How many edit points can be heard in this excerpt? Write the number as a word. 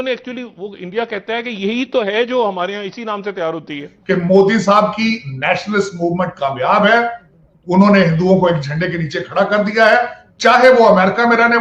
one